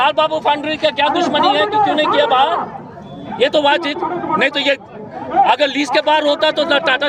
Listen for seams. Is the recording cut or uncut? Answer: uncut